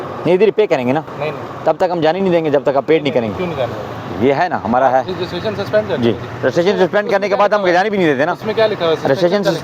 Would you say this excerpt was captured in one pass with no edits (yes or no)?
yes